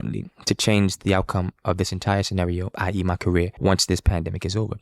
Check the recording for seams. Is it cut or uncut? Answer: cut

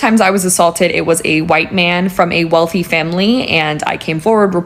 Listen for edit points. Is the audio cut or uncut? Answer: uncut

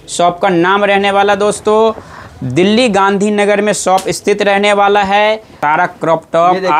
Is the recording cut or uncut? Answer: cut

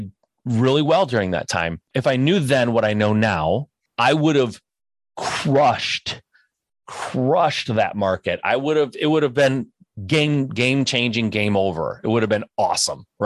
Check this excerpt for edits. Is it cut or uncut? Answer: cut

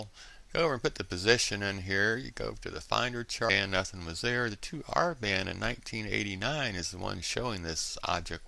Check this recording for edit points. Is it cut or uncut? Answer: uncut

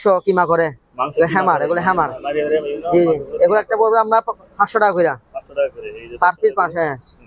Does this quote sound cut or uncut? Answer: uncut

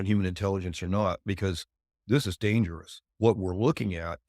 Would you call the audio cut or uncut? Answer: cut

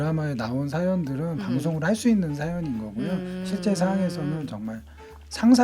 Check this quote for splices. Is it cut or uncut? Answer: uncut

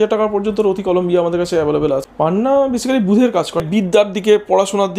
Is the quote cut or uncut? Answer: cut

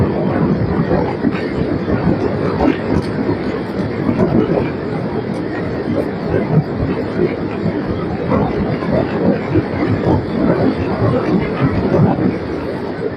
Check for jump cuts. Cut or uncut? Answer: uncut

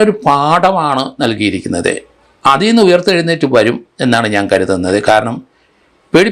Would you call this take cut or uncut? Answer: uncut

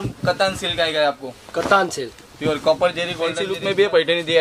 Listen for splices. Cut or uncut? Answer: cut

